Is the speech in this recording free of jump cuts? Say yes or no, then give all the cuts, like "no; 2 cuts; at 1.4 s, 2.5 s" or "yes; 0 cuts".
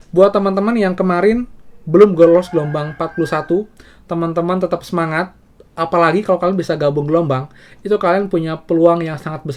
yes; 0 cuts